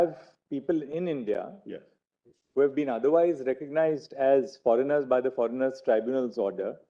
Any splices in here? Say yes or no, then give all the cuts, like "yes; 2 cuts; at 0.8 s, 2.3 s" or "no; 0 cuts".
no; 0 cuts